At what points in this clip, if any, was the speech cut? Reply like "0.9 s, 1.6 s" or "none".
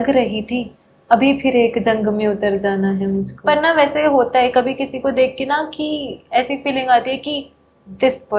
3.3 s